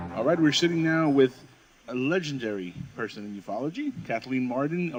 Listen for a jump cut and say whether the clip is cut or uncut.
uncut